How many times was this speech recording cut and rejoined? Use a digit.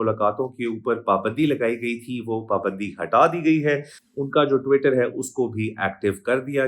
0